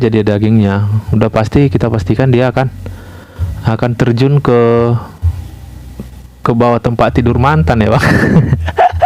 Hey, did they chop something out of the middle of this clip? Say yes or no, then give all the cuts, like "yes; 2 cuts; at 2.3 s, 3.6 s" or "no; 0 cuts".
no; 0 cuts